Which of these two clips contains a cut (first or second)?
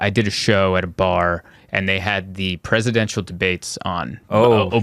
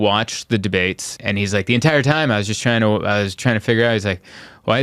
second